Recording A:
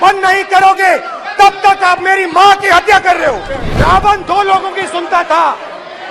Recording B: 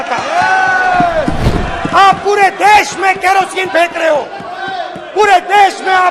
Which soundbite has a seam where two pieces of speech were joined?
A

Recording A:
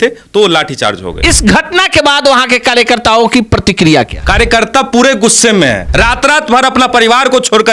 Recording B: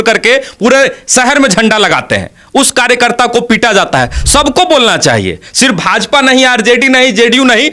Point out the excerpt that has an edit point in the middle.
A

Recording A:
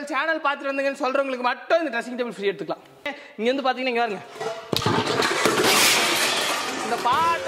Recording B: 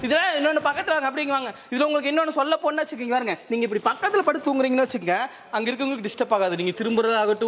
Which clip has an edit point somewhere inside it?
A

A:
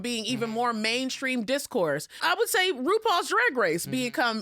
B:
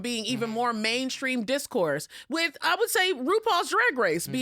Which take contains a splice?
A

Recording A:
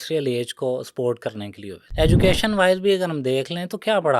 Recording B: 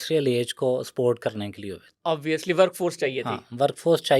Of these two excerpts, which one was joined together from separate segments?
A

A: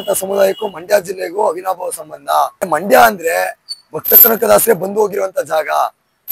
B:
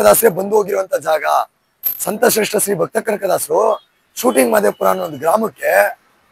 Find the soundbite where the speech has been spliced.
A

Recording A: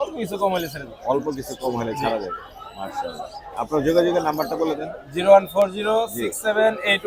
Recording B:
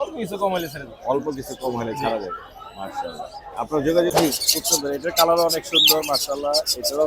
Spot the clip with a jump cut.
B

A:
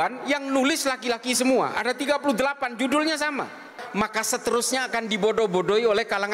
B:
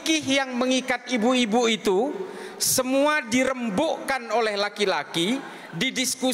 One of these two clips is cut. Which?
A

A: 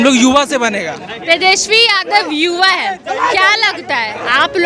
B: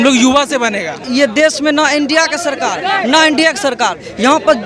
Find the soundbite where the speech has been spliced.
B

